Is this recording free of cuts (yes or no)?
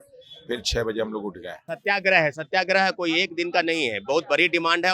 no